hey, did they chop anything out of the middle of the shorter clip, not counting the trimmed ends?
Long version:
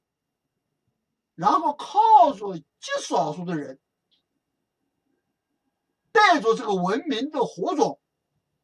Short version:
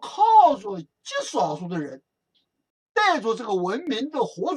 yes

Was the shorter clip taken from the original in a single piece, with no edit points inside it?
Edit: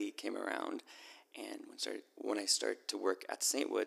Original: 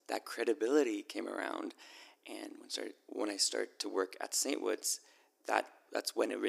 yes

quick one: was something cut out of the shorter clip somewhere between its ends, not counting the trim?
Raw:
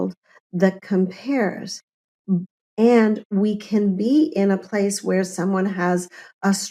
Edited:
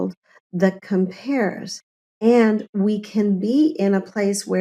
yes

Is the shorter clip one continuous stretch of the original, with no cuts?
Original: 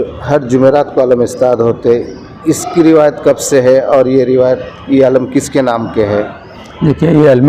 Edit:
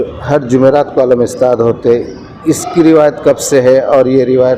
yes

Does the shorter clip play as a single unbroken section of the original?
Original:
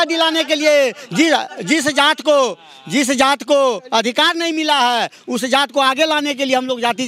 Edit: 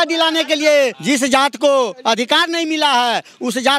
no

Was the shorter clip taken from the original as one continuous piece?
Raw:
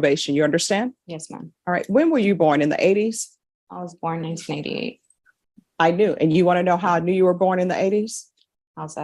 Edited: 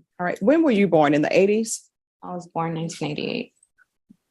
yes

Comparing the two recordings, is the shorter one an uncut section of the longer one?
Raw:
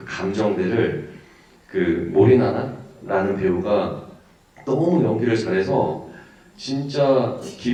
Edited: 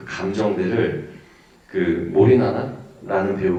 yes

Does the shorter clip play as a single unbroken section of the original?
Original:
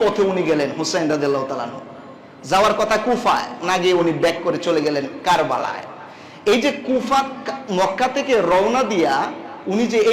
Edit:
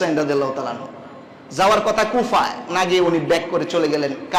yes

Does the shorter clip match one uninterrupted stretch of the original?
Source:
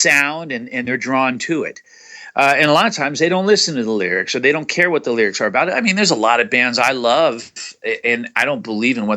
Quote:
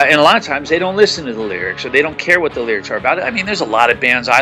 yes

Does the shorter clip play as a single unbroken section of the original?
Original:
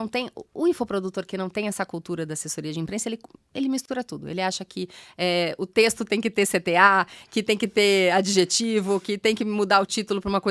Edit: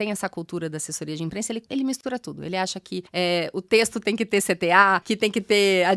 no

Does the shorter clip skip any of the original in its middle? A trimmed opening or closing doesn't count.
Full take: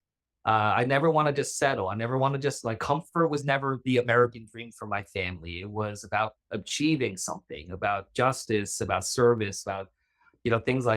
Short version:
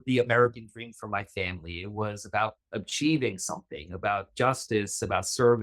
no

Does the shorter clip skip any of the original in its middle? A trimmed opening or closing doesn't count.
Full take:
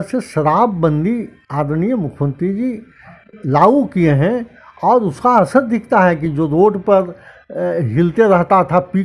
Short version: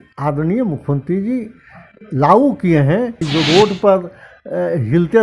yes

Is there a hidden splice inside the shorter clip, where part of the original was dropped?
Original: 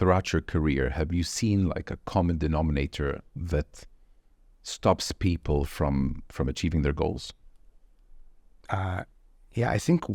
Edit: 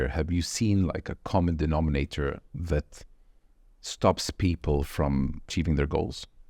yes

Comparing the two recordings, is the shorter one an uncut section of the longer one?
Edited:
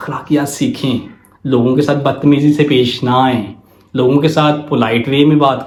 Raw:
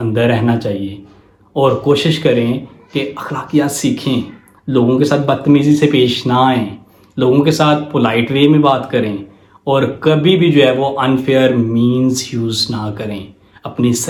yes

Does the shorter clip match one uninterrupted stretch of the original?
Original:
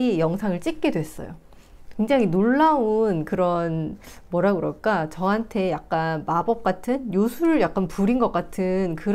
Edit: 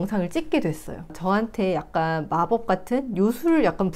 no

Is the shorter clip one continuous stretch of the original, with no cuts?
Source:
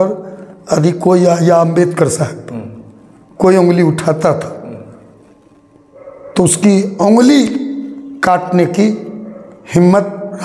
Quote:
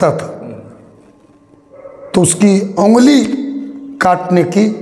yes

